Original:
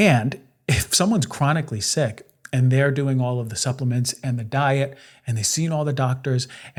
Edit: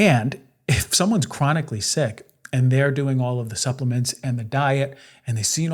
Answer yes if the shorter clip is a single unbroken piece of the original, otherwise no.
yes